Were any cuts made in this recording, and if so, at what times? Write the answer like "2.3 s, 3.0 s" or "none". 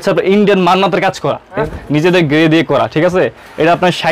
1.7 s